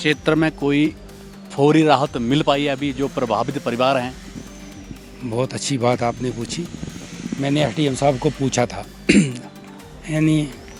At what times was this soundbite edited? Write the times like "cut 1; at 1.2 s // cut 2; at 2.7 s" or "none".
none